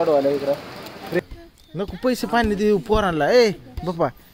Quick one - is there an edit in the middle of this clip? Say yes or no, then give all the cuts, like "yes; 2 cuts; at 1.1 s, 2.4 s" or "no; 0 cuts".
yes; 1 cut; at 1.2 s